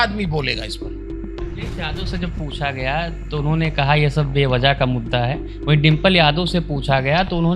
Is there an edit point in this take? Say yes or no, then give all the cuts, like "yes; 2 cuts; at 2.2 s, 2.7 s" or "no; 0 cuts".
no; 0 cuts